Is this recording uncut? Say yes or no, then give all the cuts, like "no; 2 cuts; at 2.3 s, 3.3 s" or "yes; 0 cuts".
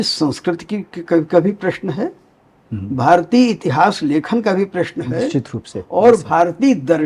yes; 0 cuts